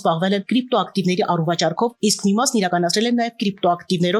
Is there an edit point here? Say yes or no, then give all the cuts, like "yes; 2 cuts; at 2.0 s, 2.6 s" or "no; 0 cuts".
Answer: no; 0 cuts